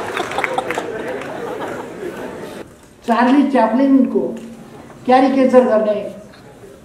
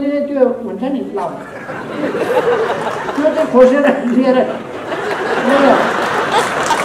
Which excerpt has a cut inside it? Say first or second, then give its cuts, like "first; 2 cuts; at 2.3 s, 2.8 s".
first; 1 cut; at 2.6 s